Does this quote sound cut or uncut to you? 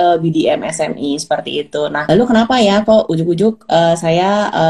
cut